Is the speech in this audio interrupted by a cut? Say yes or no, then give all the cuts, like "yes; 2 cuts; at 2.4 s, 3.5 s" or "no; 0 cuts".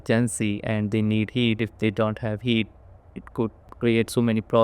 yes; 1 cut; at 3.7 s